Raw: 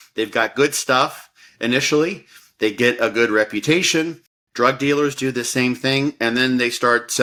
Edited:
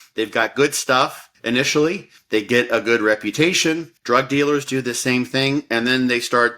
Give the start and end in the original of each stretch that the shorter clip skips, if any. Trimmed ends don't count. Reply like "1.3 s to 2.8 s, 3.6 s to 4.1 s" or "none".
1.3 s to 1.4 s, 2.3 s to 2.4 s, 4.2 s to 4.4 s